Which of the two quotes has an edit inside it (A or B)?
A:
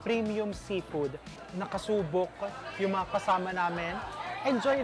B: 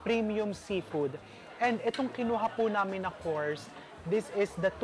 A